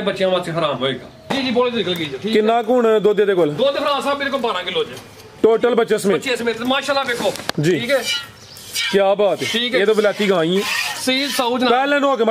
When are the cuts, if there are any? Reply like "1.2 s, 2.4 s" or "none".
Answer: 1.2 s